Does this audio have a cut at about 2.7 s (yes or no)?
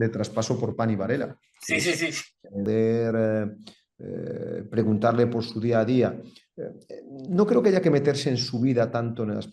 yes